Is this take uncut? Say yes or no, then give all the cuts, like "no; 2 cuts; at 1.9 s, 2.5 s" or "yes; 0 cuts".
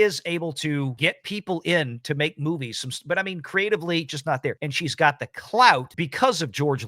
no; 3 cuts; at 0.9 s, 4.7 s, 6.0 s